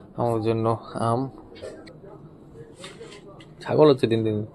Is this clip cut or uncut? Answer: cut